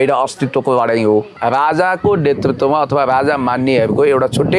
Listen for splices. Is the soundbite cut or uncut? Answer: cut